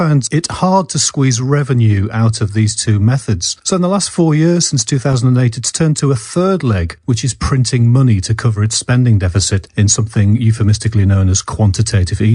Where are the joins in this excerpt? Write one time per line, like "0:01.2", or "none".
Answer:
none